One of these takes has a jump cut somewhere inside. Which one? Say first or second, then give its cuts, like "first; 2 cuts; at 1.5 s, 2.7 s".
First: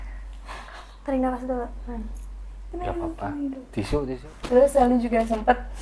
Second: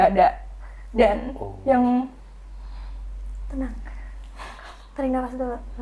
first; 1 cut; at 4.1 s